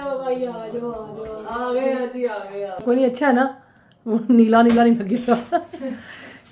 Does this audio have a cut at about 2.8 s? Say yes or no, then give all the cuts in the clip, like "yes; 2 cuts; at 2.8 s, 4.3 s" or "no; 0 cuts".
yes; 1 cut; at 2.8 s